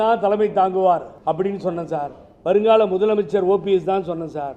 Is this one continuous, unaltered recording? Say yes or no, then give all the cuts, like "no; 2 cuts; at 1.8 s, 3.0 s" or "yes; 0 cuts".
no; 1 cut; at 1.1 s